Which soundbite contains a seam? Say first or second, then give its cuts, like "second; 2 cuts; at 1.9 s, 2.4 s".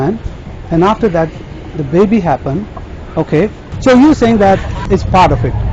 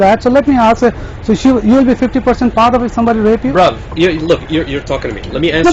first; 2 cuts; at 3.7 s, 4.8 s